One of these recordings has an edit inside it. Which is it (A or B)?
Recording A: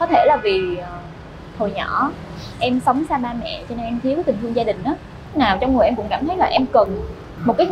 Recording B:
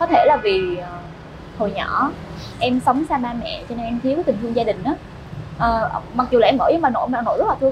A